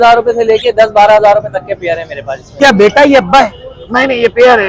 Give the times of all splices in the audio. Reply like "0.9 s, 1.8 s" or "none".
2.6 s